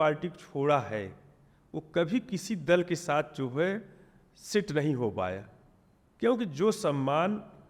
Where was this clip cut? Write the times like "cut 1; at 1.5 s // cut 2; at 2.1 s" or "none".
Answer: none